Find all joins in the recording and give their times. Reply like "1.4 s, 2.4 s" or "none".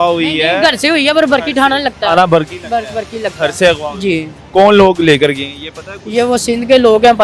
none